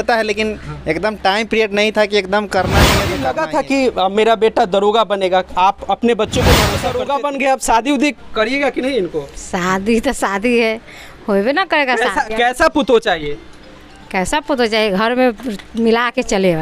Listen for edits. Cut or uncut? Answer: cut